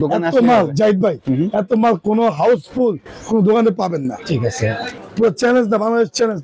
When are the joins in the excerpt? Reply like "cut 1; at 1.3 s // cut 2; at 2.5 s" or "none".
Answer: cut 1; at 4.9 s

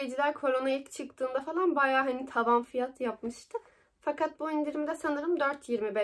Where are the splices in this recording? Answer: none

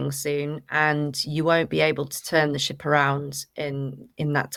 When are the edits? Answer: none

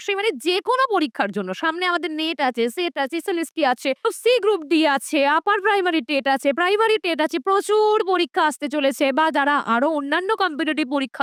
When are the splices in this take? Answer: none

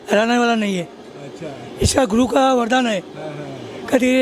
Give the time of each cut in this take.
none

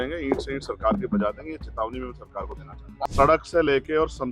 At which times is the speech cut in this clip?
cut 1; at 2.9 s

